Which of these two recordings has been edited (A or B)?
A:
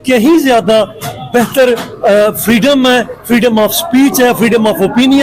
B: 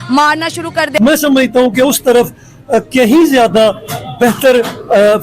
B